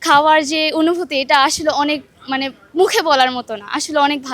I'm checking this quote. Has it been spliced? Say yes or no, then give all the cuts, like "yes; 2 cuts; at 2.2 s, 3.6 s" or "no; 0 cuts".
yes; 1 cut; at 2.6 s